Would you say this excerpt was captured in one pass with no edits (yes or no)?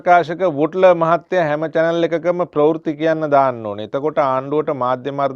yes